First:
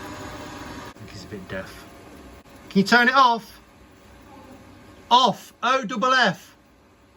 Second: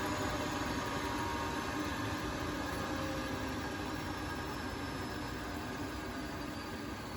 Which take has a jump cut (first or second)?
first